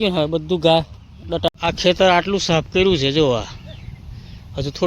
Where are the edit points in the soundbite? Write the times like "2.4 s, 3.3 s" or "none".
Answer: 1.5 s